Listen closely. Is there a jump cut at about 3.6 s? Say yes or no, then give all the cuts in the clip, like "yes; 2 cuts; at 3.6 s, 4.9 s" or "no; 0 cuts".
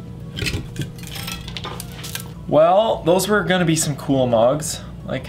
no; 1 cut; at 2.4 s